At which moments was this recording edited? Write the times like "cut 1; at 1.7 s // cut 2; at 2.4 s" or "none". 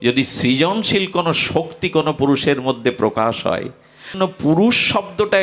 cut 1; at 4.1 s